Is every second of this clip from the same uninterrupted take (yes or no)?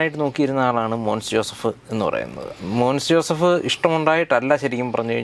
yes